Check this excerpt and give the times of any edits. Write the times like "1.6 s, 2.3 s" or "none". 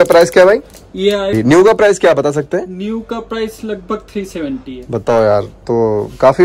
1.3 s